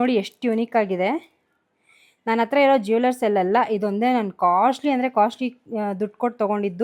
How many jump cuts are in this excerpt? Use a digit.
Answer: 0